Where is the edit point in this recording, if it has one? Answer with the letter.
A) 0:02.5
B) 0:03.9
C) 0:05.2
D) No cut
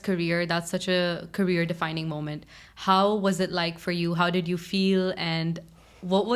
D